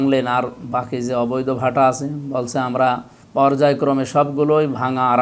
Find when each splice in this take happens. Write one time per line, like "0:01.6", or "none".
0:03.2